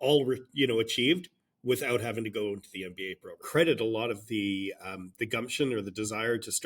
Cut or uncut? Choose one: cut